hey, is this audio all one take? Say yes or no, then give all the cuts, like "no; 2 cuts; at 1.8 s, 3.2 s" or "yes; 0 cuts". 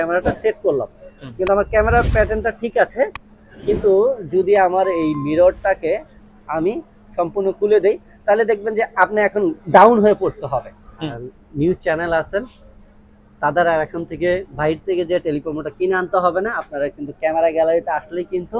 no; 1 cut; at 11.0 s